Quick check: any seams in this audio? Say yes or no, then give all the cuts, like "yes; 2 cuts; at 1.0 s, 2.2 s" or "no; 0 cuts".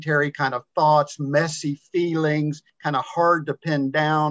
yes; 1 cut; at 2.7 s